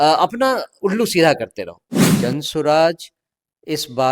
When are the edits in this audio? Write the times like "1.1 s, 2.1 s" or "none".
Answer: 2.1 s